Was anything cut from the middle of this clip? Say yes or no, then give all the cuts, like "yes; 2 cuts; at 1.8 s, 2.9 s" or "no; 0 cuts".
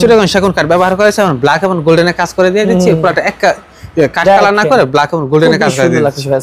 no; 0 cuts